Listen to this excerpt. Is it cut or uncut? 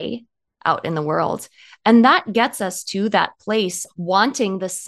cut